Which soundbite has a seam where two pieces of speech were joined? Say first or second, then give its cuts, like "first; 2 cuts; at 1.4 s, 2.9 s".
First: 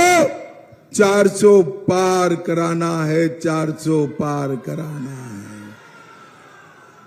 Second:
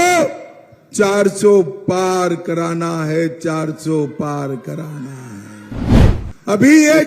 second; 1 cut; at 5.9 s